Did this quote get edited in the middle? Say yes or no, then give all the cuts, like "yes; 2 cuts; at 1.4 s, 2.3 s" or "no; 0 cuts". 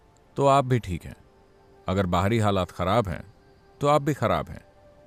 no; 0 cuts